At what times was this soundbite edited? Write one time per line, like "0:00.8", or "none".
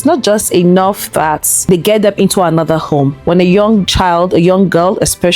0:01.5
0:03.2